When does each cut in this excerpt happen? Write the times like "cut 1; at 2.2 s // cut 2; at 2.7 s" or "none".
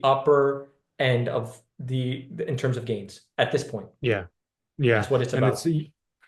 none